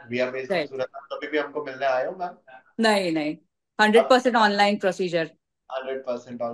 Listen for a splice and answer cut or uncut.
uncut